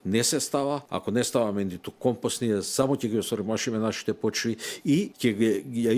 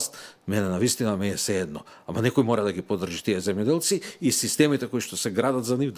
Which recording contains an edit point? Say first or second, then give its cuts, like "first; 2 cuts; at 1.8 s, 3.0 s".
first; 2 cuts; at 0.9 s, 5.1 s